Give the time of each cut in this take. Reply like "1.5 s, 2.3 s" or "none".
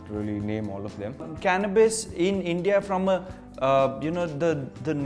1.0 s